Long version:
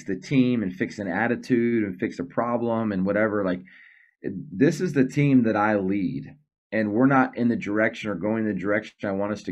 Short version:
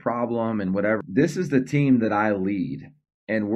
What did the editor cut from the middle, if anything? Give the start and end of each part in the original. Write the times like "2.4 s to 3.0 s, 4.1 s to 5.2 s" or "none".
3.3 s to 4.4 s